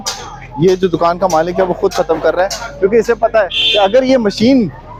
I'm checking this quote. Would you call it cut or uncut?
uncut